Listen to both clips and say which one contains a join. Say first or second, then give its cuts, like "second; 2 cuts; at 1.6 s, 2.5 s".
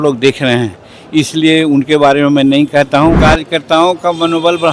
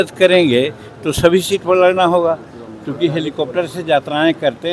first; 1 cut; at 3.2 s